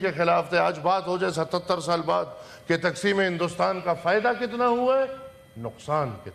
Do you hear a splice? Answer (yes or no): no